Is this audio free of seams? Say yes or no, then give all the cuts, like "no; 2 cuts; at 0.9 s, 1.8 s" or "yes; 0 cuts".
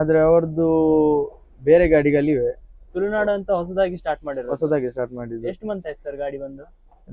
yes; 0 cuts